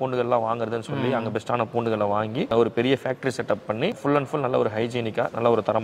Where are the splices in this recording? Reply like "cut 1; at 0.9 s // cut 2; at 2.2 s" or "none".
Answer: cut 1; at 2.5 s // cut 2; at 4.0 s